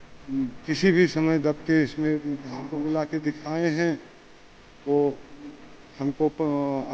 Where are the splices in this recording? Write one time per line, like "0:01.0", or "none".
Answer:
0:02.6